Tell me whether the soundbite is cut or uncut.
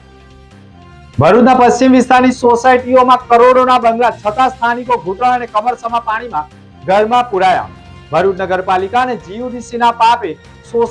cut